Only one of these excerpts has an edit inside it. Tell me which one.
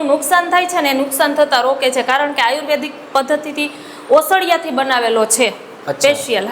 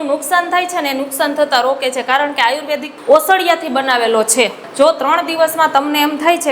second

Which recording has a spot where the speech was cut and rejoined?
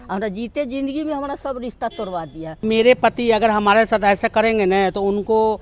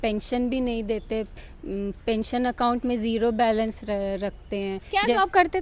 first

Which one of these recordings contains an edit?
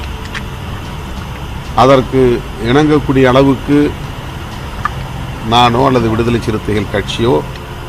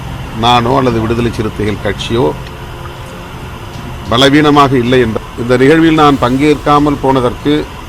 second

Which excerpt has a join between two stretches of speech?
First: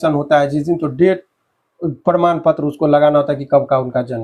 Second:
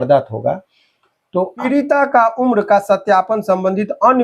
second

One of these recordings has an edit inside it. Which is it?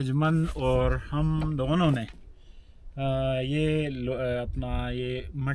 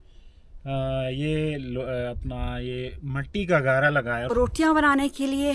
second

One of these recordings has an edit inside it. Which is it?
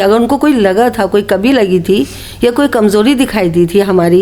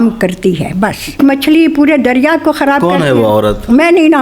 second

